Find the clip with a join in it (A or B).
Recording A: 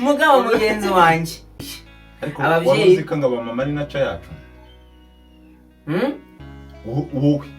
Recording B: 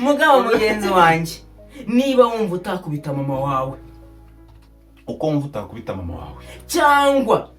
A